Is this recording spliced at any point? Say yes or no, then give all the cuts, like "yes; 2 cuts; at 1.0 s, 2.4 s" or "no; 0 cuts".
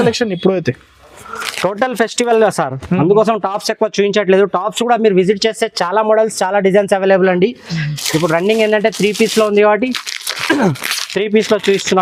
no; 0 cuts